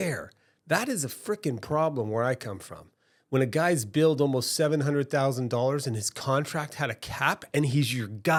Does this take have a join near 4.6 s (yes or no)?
no